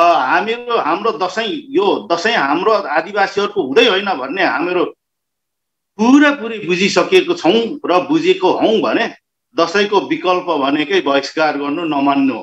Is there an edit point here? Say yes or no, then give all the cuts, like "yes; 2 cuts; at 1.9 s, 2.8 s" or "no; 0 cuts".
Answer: no; 0 cuts